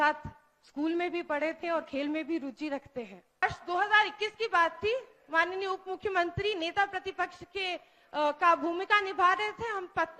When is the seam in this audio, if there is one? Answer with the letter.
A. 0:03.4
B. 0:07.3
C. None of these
A